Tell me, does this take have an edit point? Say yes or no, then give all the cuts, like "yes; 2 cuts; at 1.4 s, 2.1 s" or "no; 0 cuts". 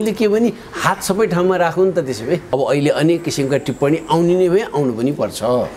yes; 1 cut; at 2.5 s